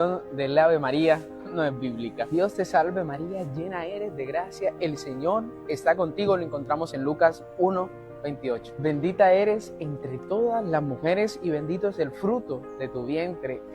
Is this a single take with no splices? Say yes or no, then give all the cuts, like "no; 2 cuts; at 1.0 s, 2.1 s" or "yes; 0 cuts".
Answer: no; 1 cut; at 8.7 s